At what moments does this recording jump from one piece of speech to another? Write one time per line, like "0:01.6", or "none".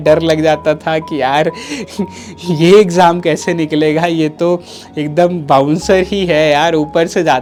none